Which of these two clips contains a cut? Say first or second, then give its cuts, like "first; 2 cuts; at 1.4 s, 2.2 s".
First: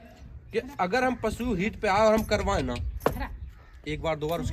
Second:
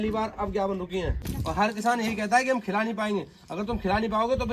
second; 1 cut; at 1.3 s